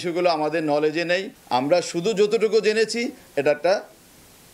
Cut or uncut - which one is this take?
uncut